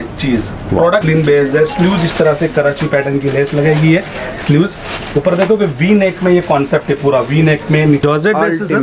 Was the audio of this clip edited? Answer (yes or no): yes